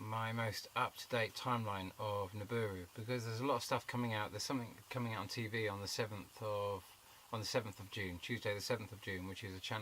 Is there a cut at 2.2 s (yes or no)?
no